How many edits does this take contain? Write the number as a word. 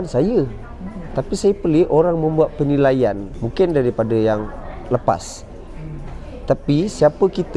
zero